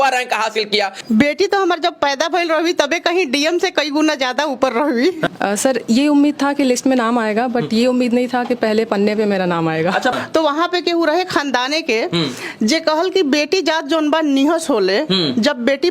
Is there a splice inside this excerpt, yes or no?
yes